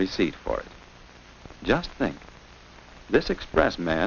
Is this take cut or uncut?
uncut